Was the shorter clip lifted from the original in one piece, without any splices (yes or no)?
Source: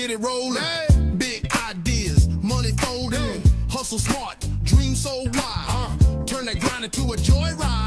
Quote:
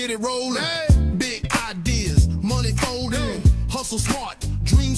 yes